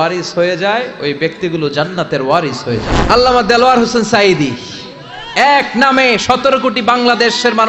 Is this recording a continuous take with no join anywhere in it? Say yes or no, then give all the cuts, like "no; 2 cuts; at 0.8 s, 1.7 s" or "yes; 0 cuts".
no; 1 cut; at 2.9 s